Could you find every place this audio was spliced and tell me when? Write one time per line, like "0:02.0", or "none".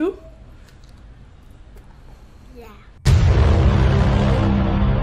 none